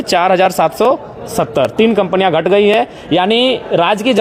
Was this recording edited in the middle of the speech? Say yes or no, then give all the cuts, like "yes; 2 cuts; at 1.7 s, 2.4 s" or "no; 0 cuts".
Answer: no; 0 cuts